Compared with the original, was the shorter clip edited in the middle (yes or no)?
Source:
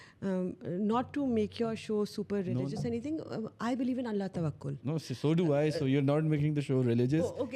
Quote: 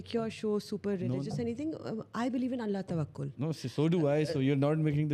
no